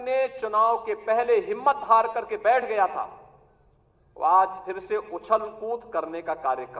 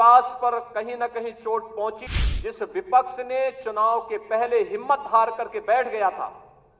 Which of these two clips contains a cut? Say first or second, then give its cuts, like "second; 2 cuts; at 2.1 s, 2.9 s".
second; 1 cut; at 2.0 s